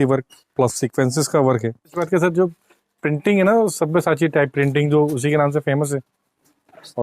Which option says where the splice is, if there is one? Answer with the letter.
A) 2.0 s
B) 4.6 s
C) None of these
A